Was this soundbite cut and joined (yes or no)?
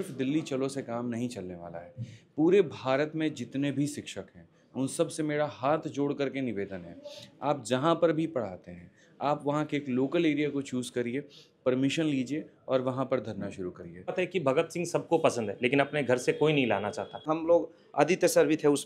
yes